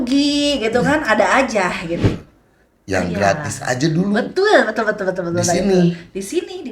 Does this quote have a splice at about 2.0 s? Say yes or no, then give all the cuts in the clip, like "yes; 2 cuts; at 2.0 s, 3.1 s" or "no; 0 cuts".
yes; 1 cut; at 2.0 s